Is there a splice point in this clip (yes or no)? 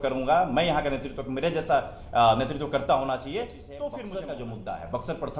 yes